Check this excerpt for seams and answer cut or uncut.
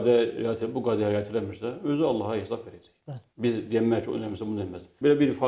uncut